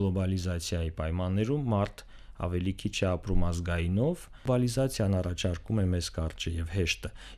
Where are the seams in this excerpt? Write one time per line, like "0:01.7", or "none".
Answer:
0:04.4